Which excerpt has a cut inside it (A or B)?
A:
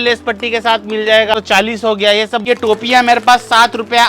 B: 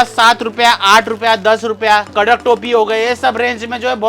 A